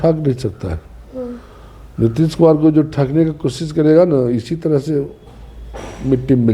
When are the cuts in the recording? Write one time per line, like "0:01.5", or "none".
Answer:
none